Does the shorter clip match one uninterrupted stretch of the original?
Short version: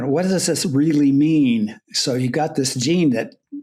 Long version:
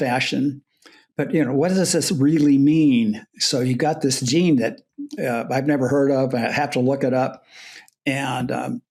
yes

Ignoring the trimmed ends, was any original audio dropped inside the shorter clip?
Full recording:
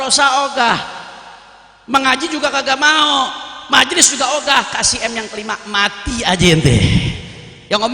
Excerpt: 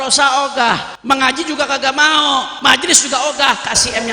yes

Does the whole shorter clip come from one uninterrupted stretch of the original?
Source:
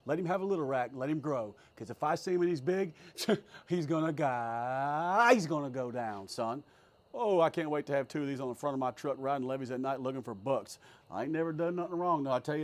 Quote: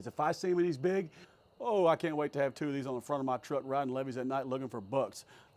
no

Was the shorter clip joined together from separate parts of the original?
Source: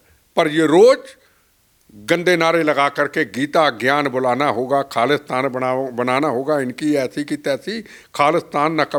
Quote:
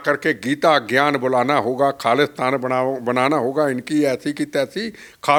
no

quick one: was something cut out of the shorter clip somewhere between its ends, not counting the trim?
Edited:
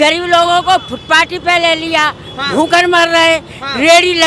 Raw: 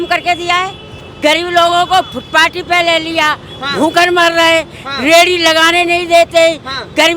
no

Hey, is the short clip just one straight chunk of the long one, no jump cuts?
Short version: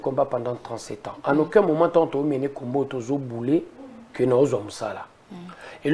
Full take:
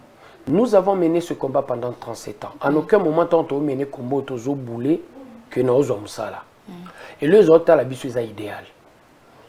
yes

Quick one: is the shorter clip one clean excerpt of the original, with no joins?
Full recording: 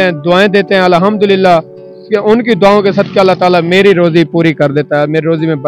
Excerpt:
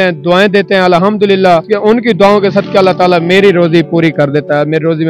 no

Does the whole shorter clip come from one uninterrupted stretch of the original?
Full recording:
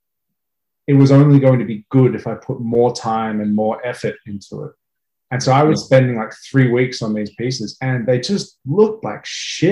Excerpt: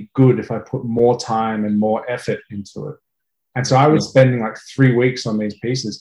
yes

